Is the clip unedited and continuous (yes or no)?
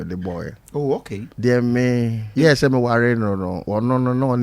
no